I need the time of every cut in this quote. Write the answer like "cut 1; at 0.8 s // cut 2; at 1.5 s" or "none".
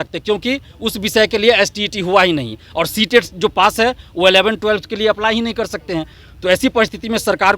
none